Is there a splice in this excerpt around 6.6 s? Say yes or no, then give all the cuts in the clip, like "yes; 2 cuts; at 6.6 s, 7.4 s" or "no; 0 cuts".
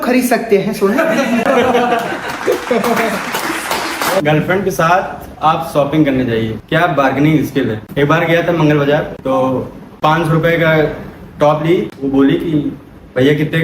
yes; 2 cuts; at 4.2 s, 6.6 s